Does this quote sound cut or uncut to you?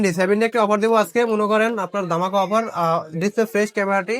uncut